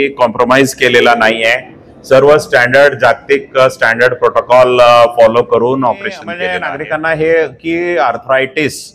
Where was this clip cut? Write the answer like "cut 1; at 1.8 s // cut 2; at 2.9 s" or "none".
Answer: cut 1; at 6.3 s